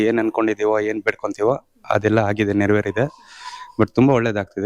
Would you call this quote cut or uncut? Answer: uncut